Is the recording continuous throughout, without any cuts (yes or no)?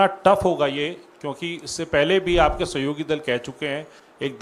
yes